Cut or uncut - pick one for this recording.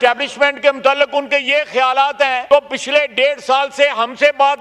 cut